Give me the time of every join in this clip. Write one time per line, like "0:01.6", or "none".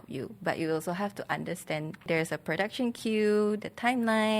0:02.1